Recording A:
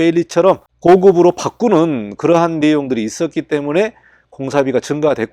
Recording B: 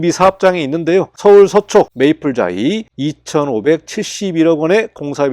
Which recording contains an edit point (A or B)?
B